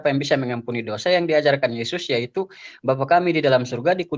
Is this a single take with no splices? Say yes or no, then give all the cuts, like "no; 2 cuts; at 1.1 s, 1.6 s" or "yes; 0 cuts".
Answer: yes; 0 cuts